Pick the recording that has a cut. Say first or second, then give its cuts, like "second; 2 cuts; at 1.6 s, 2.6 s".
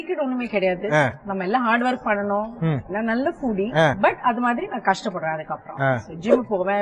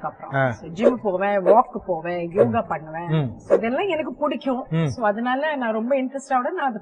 first; 3 cuts; at 1.2 s, 2.9 s, 4.0 s